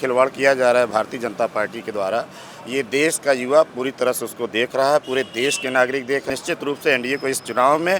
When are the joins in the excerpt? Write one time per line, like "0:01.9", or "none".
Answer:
0:06.3